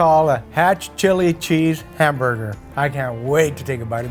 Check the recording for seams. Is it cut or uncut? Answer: uncut